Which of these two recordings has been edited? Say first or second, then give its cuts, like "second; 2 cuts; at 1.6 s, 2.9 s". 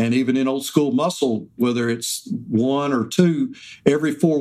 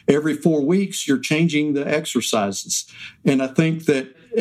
first; 1 cut; at 1.5 s